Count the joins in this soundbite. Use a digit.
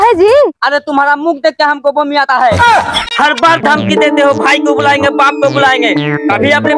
1